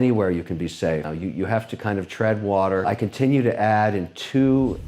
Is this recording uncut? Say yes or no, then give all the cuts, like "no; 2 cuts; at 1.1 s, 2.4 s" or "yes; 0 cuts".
no; 2 cuts; at 1.1 s, 2.8 s